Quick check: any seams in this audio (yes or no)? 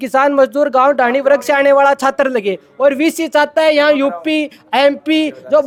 no